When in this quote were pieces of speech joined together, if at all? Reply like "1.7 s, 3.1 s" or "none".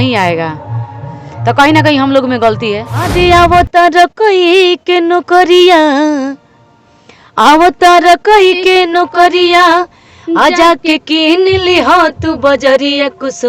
3.1 s